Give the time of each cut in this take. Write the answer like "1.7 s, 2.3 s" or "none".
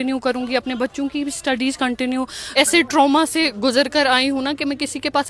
2.6 s